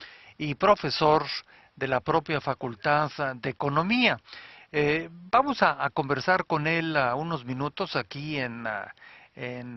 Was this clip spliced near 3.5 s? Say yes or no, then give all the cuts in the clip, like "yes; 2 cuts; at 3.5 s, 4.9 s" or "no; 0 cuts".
yes; 1 cut; at 3.5 s